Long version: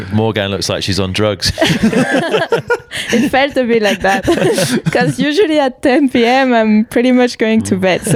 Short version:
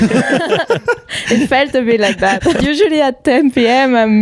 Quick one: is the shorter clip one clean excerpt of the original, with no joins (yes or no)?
no